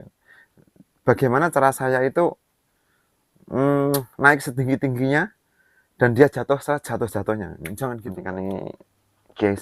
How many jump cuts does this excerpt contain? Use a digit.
1